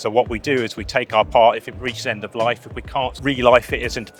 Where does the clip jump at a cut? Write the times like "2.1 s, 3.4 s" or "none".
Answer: 3.2 s